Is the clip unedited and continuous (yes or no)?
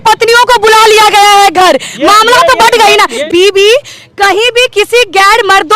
no